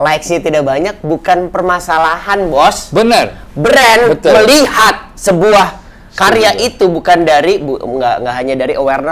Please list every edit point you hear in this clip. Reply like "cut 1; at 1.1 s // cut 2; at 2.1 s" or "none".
none